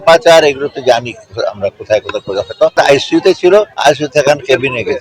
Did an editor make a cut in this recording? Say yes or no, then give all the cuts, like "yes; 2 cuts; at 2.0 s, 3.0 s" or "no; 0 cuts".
yes; 2 cuts; at 2.7 s, 3.7 s